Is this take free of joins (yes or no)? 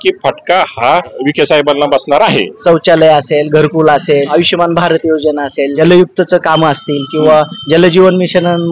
no